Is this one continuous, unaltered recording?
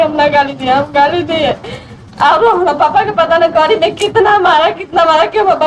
yes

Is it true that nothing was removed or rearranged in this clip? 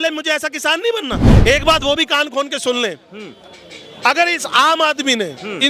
no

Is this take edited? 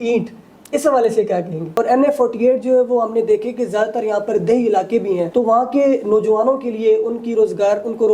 yes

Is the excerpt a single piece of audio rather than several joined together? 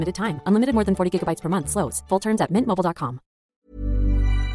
no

